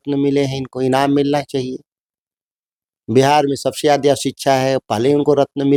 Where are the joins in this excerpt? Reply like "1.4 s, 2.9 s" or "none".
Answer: none